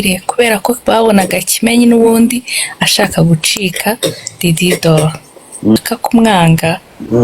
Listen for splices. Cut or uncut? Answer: cut